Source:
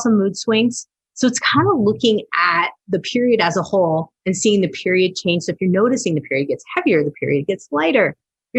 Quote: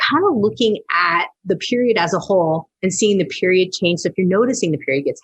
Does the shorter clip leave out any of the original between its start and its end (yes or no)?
no